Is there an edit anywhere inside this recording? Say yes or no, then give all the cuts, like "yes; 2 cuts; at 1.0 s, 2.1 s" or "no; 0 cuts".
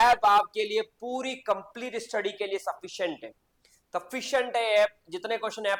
no; 0 cuts